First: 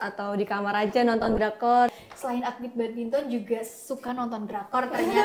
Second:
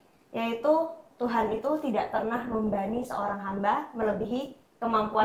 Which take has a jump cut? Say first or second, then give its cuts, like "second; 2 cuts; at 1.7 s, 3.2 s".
first; 1 cut; at 1.9 s